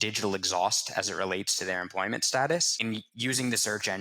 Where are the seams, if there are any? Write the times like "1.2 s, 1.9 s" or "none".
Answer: 2.8 s